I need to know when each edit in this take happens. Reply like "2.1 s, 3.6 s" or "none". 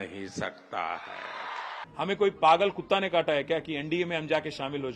1.7 s